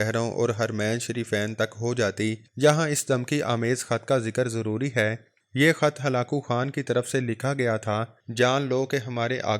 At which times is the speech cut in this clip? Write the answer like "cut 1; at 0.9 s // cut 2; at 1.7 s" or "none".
cut 1; at 2.4 s // cut 2; at 5.3 s // cut 3; at 8.2 s